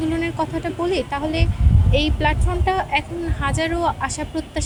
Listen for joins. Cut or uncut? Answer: uncut